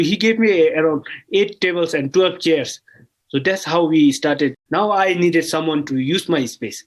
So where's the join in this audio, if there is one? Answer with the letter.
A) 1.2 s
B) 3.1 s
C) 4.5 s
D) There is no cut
C